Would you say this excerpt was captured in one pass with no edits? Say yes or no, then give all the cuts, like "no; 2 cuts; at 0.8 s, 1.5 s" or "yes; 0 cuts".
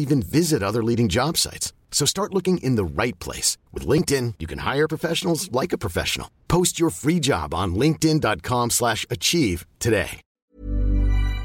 no; 1 cut; at 10.2 s